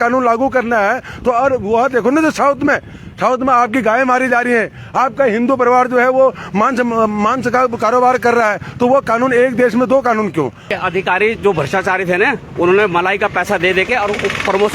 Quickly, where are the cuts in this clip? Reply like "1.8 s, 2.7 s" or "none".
10.7 s